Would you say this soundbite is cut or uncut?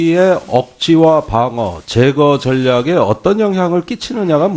cut